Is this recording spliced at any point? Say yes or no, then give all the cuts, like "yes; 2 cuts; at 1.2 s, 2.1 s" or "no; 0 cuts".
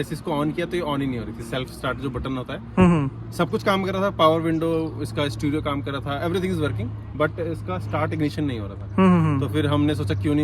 no; 0 cuts